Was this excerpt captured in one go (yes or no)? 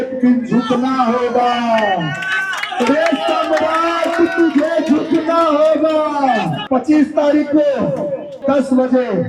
no